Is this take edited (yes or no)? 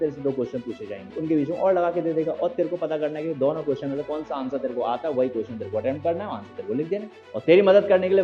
yes